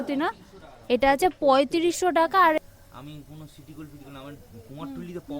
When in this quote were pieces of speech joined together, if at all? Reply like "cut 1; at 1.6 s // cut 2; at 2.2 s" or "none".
cut 1; at 2.6 s